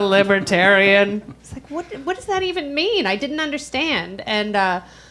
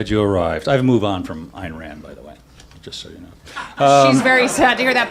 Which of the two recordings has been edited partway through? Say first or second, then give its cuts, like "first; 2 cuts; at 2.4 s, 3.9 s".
second; 1 cut; at 2.3 s